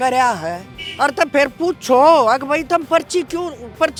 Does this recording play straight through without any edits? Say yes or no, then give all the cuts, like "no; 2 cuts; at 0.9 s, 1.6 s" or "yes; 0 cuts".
yes; 0 cuts